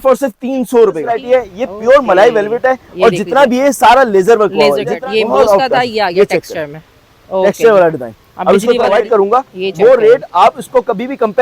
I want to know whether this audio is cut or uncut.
cut